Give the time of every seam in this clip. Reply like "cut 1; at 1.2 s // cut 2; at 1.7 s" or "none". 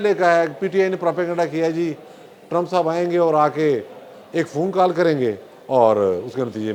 none